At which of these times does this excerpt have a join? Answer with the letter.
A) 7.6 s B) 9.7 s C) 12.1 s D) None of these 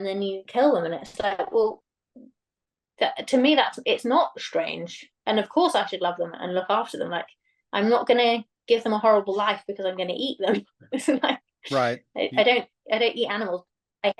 D